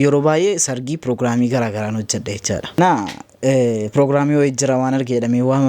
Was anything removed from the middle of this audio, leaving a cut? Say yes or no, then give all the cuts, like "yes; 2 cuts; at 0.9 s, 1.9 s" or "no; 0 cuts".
yes; 1 cut; at 2.8 s